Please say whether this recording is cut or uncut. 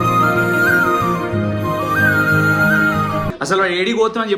cut